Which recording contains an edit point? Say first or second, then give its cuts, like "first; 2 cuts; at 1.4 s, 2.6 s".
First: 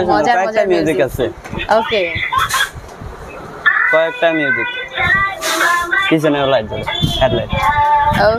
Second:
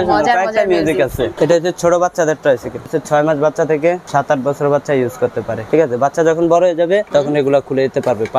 second; 5 cuts; at 1.3 s, 2.9 s, 4.0 s, 5.6 s, 7.1 s